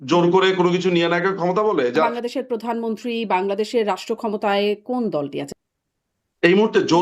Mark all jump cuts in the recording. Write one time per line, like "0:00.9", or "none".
0:02.1
0:05.5

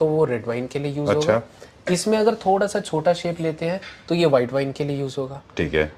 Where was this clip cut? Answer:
none

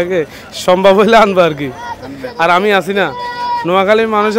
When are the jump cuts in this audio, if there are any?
none

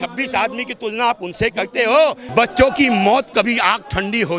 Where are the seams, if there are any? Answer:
0:02.3

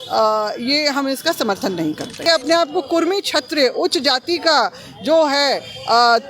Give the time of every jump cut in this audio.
0:02.2

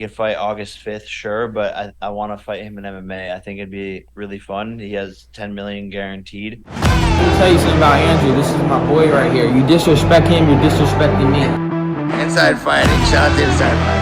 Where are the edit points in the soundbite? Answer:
0:06.6

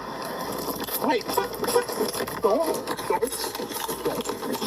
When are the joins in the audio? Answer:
0:01.7

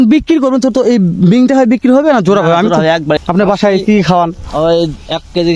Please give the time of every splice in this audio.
0:03.2

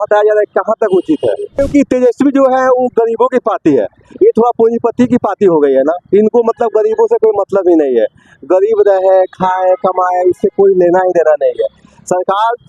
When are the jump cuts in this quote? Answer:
0:01.6

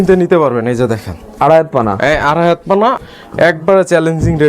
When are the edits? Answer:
0:03.0

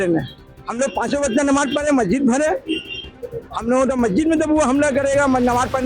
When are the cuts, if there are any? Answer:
none

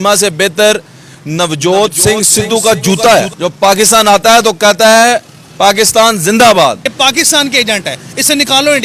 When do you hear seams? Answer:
0:03.3
0:06.9

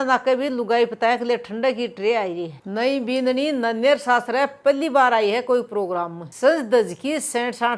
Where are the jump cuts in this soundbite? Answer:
0:02.5

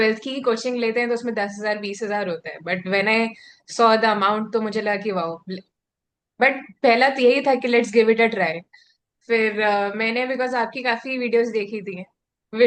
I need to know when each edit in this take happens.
none

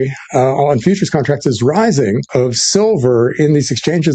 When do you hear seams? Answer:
0:02.3

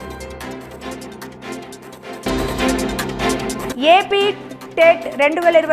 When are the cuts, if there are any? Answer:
0:02.2
0:03.7

